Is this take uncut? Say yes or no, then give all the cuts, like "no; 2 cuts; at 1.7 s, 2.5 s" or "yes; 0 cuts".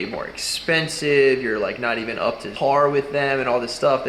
no; 1 cut; at 2.5 s